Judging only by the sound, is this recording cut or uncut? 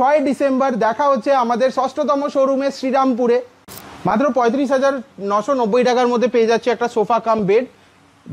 uncut